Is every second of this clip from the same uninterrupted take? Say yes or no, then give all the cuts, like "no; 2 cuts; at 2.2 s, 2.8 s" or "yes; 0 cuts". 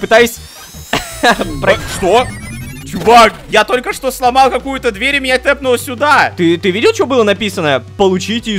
yes; 0 cuts